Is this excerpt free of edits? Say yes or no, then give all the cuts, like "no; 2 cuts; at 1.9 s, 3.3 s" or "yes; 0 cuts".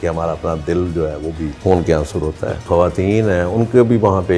no; 2 cuts; at 1.6 s, 2.7 s